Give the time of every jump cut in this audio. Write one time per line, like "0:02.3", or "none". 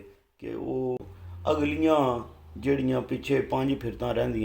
0:01.0